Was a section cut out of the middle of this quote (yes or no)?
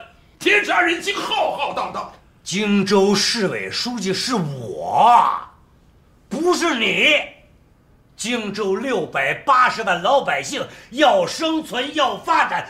no